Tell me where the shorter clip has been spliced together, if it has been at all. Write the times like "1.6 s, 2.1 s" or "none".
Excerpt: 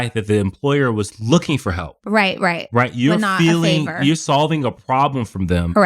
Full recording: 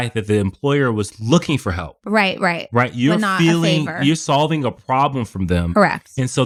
none